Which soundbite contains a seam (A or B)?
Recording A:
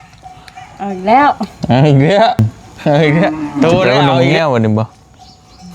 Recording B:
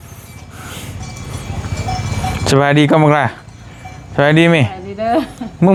A